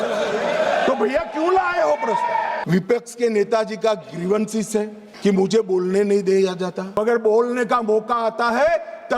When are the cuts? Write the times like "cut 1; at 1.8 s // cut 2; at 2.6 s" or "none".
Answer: cut 1; at 2.6 s // cut 2; at 5.0 s // cut 3; at 7.0 s